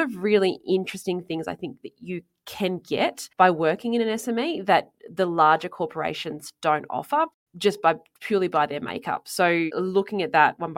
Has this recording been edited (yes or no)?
no